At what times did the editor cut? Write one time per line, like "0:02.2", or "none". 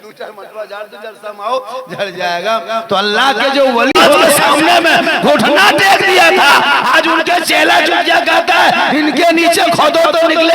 0:04.3